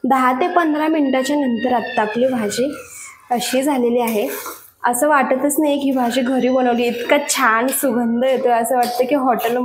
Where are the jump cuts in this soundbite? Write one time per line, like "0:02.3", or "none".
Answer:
none